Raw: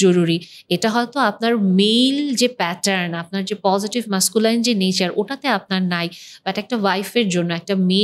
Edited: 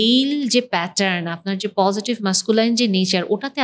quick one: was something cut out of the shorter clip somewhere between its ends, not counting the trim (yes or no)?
no